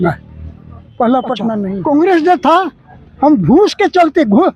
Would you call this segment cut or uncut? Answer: cut